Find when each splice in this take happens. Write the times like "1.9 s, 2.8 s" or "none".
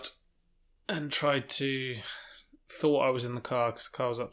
none